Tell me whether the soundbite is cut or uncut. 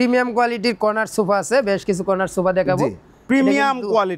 uncut